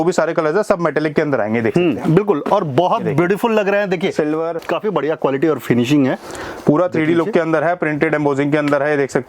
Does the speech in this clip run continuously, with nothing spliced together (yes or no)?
no